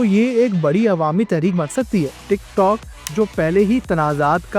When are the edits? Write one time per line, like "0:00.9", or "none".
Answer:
0:02.2